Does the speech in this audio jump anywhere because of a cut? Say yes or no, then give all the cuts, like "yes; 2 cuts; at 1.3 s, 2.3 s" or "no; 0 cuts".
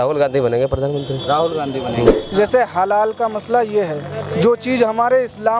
yes; 1 cut; at 2.1 s